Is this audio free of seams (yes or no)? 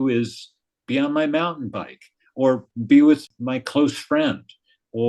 no